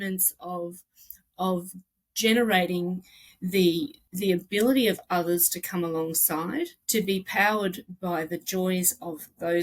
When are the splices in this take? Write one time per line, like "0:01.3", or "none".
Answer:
0:04.0
0:06.8